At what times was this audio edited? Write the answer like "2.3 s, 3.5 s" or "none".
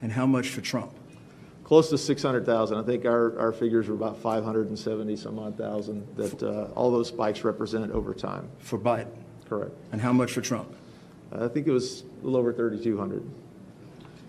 none